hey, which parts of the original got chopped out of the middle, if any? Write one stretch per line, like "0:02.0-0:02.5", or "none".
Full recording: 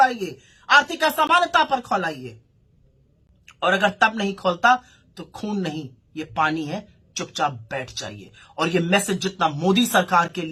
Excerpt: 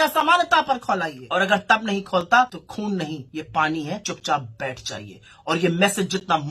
0:02.2-0:03.5
0:05.3-0:05.8
0:06.9-0:07.2